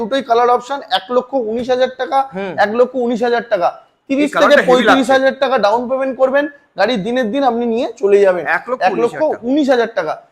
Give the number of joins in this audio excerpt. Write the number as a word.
zero